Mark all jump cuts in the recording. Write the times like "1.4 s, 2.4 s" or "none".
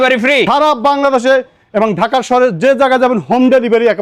none